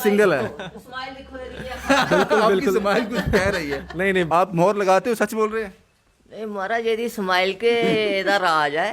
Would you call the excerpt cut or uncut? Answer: cut